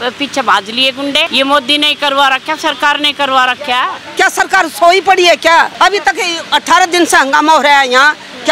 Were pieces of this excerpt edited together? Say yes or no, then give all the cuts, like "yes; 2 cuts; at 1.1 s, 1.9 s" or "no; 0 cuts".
yes; 3 cuts; at 1.3 s, 4.0 s, 5.7 s